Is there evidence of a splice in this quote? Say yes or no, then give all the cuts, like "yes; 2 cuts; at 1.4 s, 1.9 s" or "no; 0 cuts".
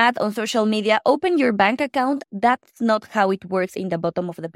yes; 2 cuts; at 2.2 s, 3.7 s